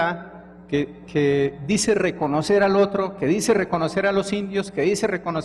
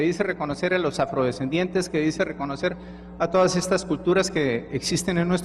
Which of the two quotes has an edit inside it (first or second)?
first